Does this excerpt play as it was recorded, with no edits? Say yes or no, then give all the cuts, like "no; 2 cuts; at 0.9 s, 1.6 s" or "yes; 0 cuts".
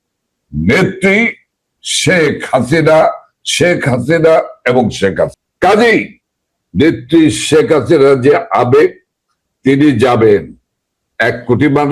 no; 1 cut; at 5.4 s